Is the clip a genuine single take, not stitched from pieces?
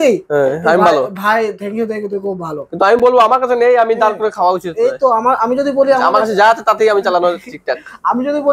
yes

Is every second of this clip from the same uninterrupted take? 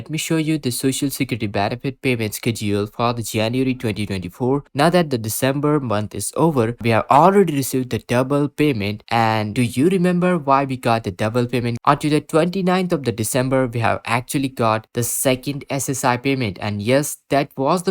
no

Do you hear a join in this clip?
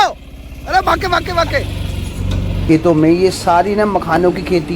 yes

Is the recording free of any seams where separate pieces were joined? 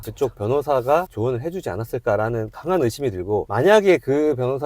no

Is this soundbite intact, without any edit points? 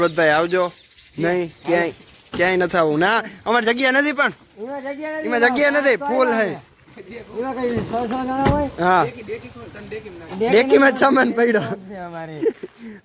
yes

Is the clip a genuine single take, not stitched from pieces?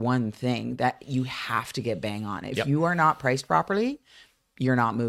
yes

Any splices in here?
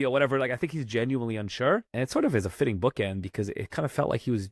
yes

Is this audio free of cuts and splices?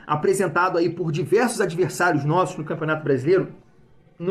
yes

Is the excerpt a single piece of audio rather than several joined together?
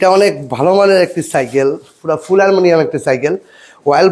yes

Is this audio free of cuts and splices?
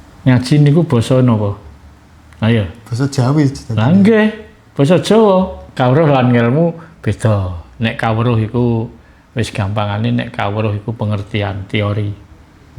no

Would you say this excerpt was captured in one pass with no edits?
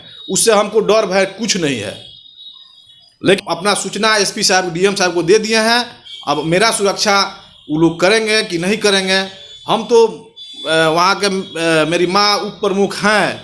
yes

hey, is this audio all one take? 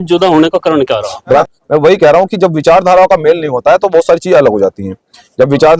no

